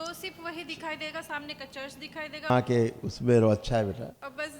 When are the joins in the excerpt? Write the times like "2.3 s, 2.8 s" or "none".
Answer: 2.5 s